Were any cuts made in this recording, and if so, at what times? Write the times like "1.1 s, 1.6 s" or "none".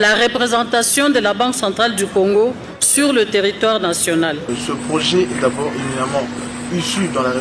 4.5 s